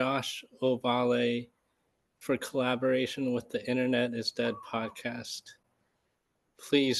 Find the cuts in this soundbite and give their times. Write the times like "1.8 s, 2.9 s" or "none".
none